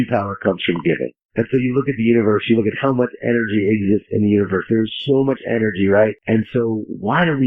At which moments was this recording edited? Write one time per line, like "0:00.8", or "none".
0:01.2
0:06.2

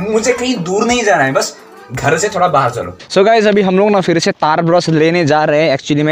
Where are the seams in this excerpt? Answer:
0:03.0

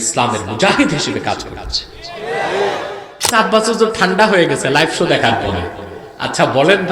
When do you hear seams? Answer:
0:03.3

